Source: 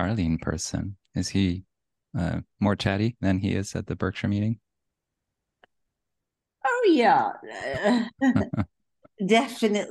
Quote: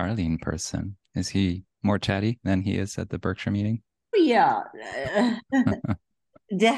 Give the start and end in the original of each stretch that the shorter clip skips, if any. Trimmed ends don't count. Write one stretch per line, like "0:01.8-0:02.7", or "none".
0:01.7-0:02.5
0:04.9-0:06.8